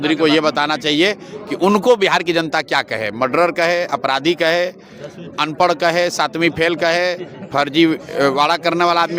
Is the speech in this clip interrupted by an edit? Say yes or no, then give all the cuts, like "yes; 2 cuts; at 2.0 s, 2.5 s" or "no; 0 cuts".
no; 0 cuts